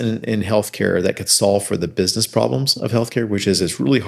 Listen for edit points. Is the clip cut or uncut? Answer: uncut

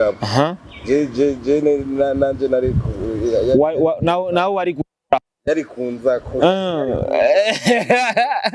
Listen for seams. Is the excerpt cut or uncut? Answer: uncut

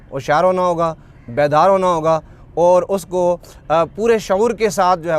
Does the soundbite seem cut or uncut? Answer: uncut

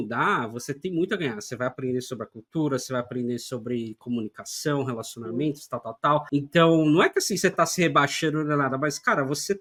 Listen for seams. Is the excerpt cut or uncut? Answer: uncut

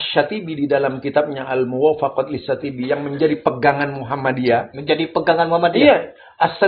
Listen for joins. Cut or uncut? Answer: uncut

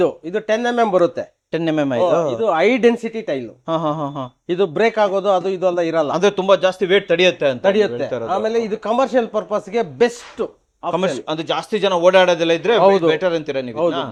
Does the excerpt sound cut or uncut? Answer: uncut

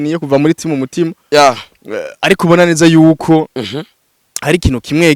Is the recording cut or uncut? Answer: uncut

